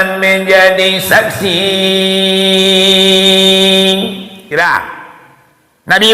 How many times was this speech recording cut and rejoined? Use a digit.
1